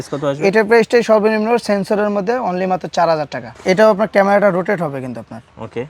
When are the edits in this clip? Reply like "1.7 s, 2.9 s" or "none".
3.5 s